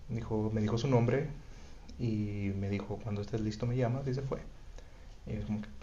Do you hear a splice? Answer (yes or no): no